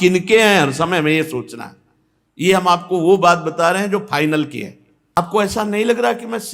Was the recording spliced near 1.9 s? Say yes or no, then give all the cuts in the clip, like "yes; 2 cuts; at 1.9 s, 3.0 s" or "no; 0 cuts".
no; 1 cut; at 5.2 s